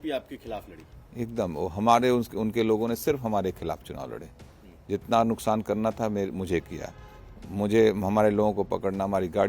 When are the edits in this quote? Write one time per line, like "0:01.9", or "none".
none